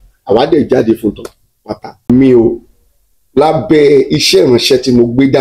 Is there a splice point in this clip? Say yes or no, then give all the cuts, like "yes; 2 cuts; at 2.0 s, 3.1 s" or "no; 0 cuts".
yes; 1 cut; at 2.1 s